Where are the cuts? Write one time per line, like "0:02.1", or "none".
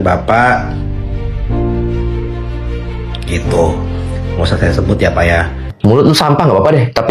0:05.7